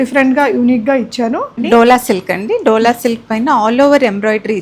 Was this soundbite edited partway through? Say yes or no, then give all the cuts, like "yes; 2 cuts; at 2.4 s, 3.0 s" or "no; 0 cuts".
yes; 1 cut; at 1.5 s